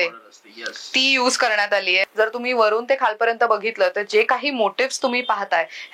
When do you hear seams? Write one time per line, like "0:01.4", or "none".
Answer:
0:02.0